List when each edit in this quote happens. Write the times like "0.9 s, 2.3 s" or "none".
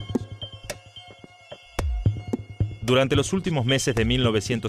none